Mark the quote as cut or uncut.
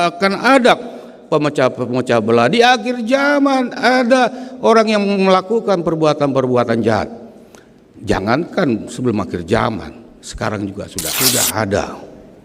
cut